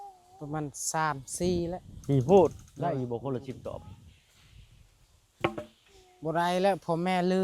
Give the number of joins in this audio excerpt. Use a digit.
1